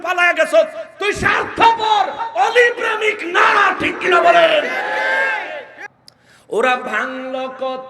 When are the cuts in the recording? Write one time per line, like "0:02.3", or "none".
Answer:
0:05.7